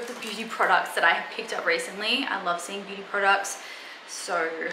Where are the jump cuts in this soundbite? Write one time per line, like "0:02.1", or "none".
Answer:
none